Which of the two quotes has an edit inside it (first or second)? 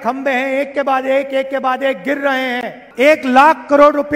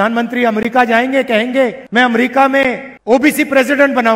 second